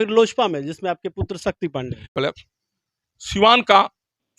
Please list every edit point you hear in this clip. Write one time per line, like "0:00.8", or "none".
0:02.1